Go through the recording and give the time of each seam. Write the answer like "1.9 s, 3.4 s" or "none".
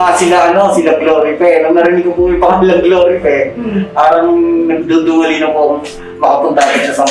none